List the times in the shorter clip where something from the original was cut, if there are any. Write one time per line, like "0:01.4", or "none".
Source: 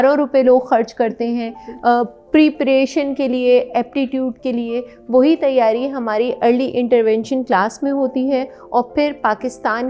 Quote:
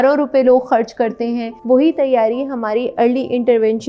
0:01.5